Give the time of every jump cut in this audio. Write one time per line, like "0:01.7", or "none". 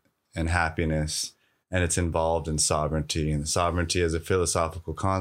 none